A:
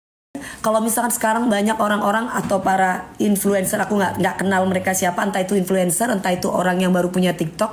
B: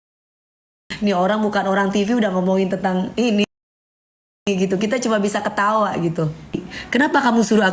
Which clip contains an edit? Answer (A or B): B